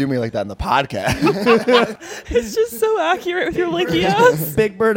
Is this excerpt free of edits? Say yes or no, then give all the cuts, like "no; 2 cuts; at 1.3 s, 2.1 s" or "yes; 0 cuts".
no; 1 cut; at 2.0 s